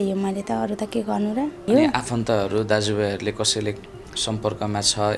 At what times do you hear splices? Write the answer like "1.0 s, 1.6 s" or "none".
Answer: 1.7 s